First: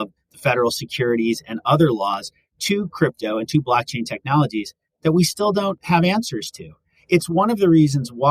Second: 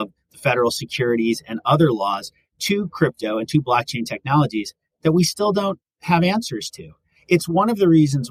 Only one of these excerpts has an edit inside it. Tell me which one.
first; 1 cut; at 5.8 s

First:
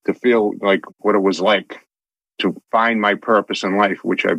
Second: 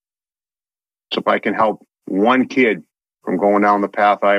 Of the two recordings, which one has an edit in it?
first; 1 cut; at 2.4 s

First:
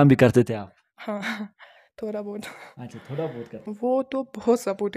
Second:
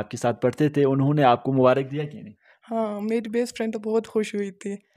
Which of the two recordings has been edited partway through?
first; 1 cut; at 3.6 s

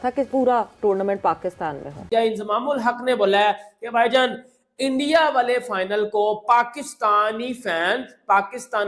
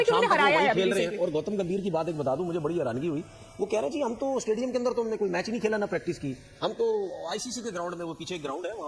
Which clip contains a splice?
first; 1 cut; at 2.0 s

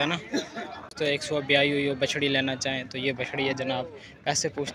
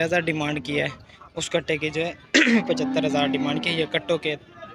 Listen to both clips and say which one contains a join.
first; 1 cut; at 0.9 s

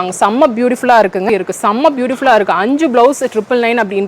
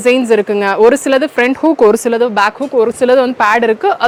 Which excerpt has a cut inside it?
first; 1 cut; at 1.3 s

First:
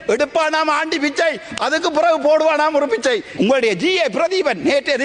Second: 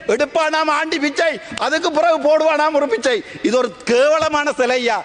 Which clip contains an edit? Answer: first; 1 cut; at 3.3 s

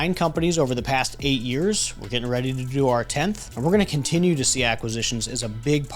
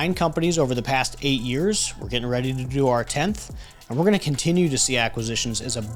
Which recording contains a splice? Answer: first; 1 cut; at 3.5 s

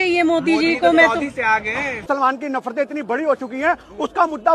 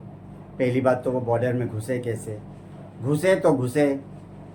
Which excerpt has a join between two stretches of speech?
first; 1 cut; at 2.1 s

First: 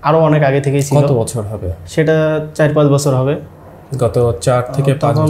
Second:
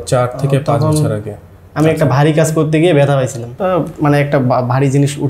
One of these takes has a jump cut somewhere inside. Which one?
second; 1 cut; at 3.5 s

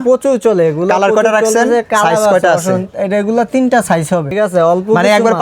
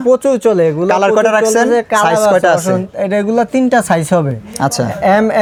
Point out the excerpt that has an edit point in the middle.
first; 1 cut; at 4.3 s

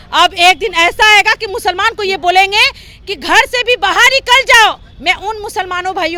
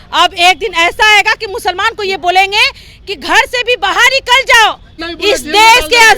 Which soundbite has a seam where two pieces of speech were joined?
second; 1 cut; at 4.9 s

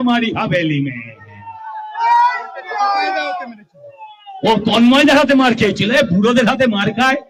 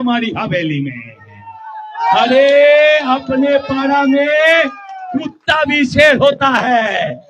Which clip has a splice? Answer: second; 1 cut; at 2.1 s

